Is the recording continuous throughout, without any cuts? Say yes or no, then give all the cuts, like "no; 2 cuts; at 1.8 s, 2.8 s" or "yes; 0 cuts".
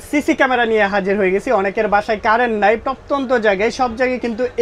yes; 0 cuts